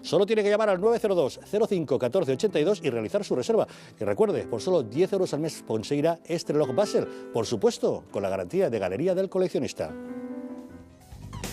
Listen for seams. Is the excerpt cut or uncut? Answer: uncut